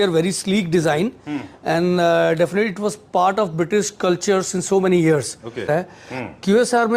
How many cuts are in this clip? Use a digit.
1